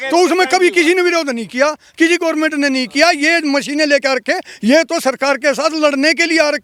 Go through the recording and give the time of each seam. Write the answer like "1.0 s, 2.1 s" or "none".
none